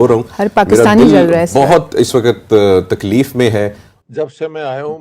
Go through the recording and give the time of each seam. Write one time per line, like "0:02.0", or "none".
0:03.9

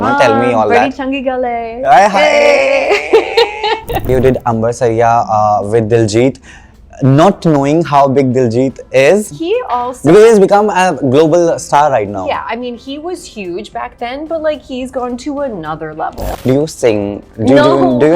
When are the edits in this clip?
0:04.1
0:09.4
0:16.4

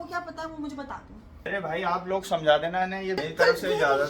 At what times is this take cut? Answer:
0:01.3
0:03.2

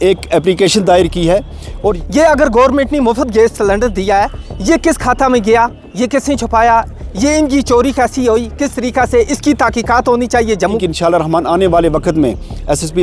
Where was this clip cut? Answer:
0:02.0
0:10.8

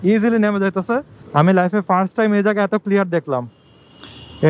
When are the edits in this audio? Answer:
0:01.2

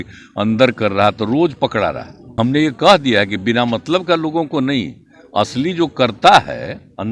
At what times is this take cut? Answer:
0:02.2

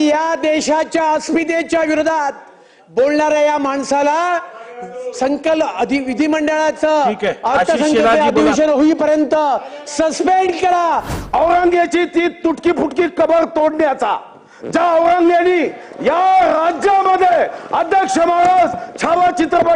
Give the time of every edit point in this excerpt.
0:11.1

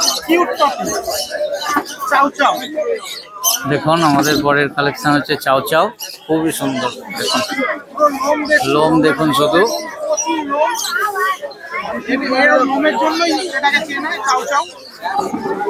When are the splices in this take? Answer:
none

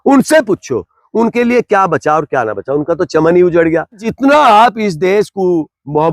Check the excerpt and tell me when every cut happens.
0:04.1

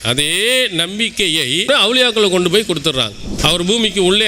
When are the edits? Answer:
0:01.7
0:03.2

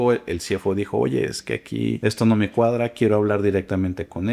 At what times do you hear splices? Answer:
0:02.0

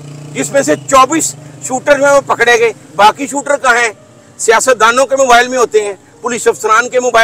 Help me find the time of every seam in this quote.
none

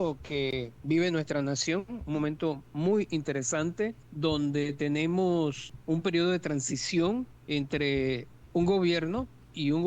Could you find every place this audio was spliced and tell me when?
0:04.0
0:05.7
0:07.4
0:08.3

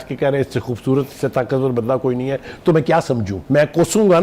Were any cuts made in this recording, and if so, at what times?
0:03.3

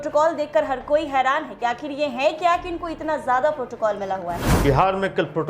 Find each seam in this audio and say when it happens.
0:04.5

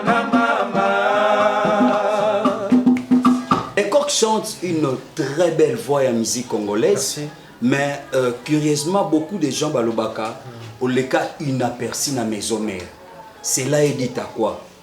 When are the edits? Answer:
0:03.7

